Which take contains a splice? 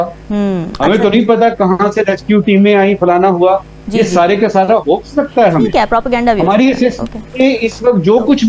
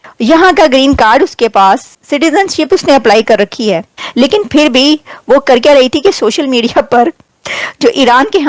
second; 1 cut; at 4.0 s

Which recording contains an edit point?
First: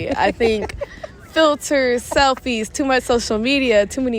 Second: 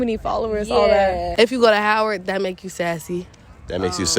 second; 1 cut; at 1.3 s

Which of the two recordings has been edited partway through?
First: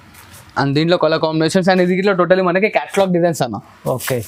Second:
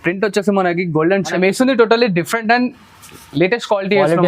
second; 1 cut; at 1.3 s

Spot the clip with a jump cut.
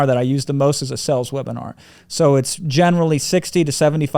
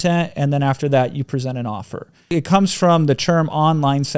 second; 1 cut; at 2.3 s

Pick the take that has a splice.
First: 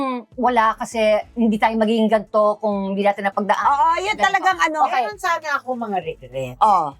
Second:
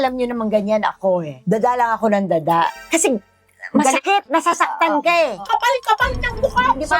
second; 2 cuts; at 2.7 s, 5.4 s

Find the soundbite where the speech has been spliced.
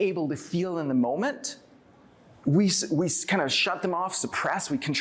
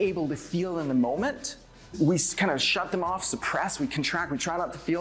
second; 1 cut; at 1.9 s

